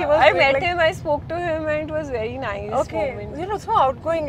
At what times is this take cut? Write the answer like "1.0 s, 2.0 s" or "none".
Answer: none

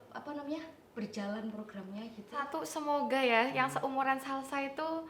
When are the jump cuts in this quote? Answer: 2.4 s

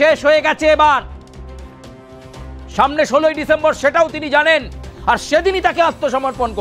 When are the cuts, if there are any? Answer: none

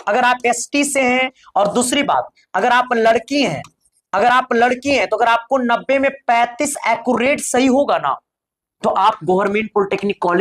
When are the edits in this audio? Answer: 1.4 s

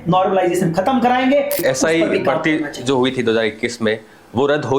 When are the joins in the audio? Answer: 1.6 s

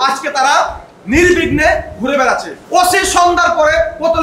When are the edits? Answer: 2.5 s

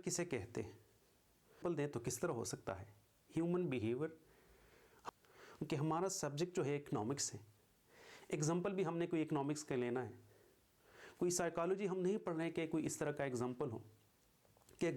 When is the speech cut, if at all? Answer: 1.6 s, 5.1 s

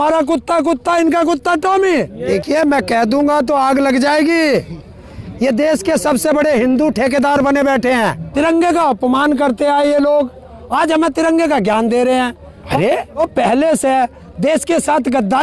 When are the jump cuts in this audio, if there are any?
2.2 s, 8.2 s, 12.8 s

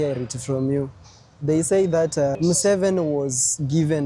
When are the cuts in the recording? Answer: 2.4 s

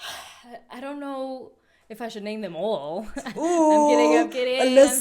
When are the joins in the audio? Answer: none

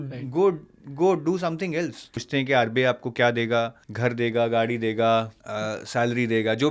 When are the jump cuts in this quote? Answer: 2.2 s, 3.8 s, 5.4 s

